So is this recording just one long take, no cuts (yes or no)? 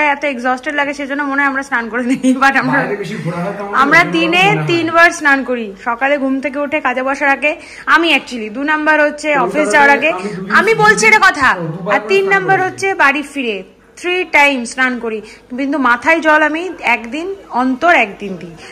yes